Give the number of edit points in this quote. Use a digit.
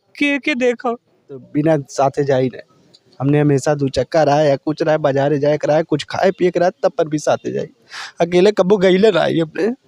1